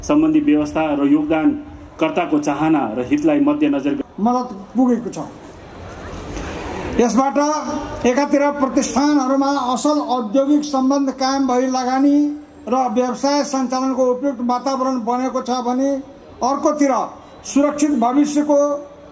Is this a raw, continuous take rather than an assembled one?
no; 1 cut; at 4.0 s

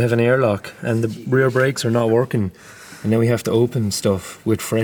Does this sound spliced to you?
no; 0 cuts

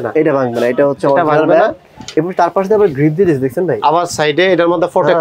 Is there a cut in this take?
yes; 1 cut; at 2.0 s

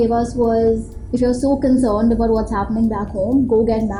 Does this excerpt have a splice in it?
no; 0 cuts

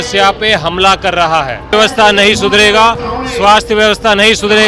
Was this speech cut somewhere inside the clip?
yes; 1 cut; at 1.7 s

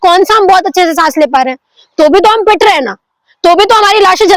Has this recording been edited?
no; 0 cuts

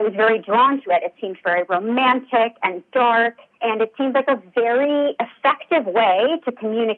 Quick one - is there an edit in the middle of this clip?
no; 0 cuts

